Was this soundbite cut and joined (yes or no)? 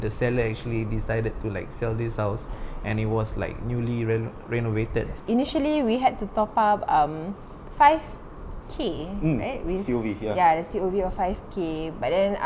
yes